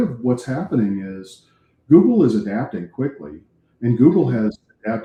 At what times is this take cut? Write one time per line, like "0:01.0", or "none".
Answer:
none